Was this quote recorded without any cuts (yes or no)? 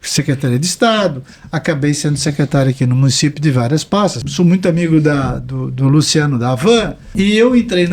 no